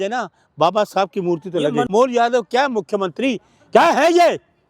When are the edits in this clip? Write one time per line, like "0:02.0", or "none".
0:01.9